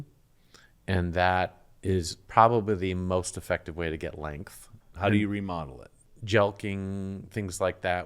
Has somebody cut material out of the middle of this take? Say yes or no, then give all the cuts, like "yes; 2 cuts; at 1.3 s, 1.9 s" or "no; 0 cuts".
yes; 2 cuts; at 4.8 s, 6.0 s